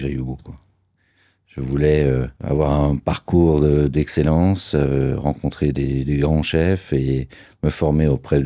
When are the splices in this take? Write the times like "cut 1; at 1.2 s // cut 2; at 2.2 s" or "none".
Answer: cut 1; at 2.3 s